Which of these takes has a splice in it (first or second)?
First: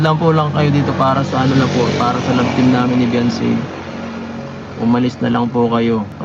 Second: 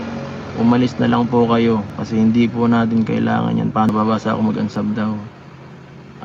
second